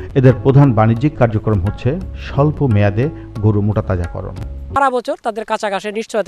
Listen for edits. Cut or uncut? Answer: cut